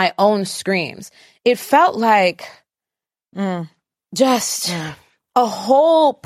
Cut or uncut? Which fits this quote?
uncut